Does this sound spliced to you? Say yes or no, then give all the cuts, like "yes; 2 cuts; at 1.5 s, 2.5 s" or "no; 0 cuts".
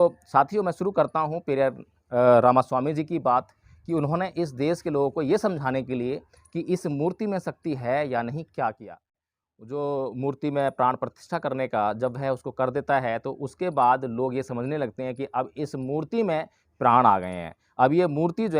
yes; 1 cut; at 9.3 s